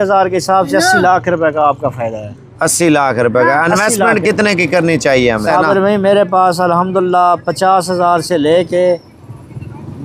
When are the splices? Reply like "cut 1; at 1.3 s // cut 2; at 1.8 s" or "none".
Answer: cut 1; at 5.4 s